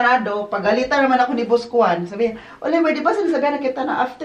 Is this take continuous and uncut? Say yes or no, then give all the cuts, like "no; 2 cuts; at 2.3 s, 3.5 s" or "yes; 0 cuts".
yes; 0 cuts